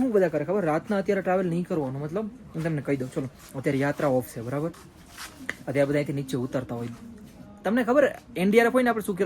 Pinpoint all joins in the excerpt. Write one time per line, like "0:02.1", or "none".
none